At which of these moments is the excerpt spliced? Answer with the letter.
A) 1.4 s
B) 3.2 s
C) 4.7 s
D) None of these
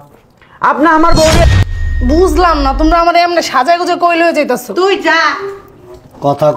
A